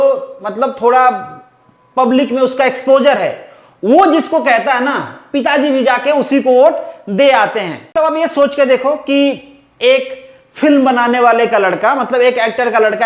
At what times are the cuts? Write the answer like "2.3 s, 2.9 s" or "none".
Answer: 7.9 s

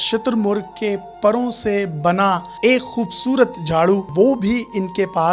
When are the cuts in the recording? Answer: 4.1 s

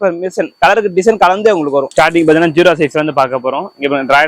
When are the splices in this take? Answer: 1.9 s

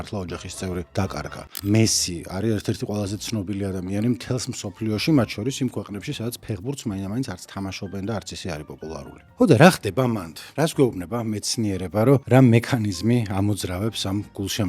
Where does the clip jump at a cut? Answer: none

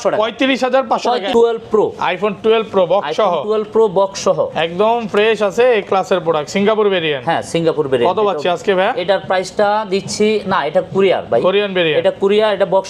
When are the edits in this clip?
1.3 s

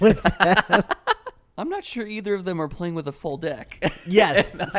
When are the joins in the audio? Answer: 1.4 s

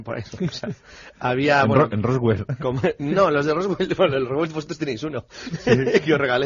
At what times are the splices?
3.4 s

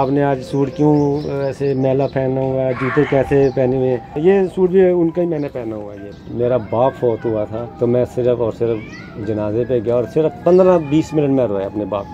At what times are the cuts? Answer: 4.1 s, 6.2 s, 7.6 s

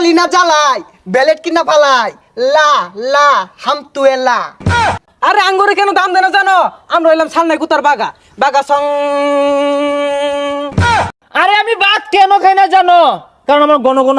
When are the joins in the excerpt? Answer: 5.1 s, 11.0 s

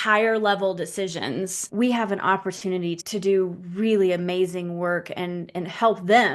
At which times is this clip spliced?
1.6 s, 3.0 s

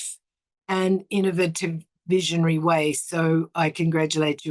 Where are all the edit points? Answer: none

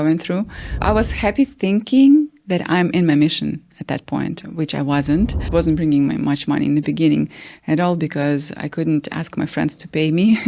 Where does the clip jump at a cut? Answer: 0.8 s, 5.4 s

